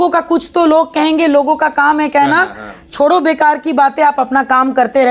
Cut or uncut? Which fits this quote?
uncut